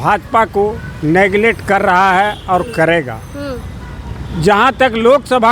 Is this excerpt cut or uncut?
uncut